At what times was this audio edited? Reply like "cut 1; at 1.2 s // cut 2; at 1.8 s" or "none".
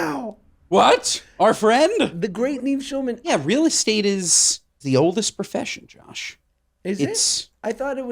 cut 1; at 2.1 s // cut 2; at 3.3 s // cut 3; at 4.8 s